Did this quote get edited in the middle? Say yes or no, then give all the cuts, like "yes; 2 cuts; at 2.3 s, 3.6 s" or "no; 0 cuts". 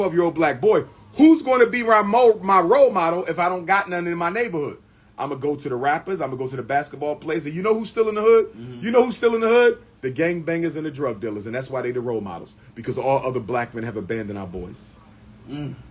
no; 0 cuts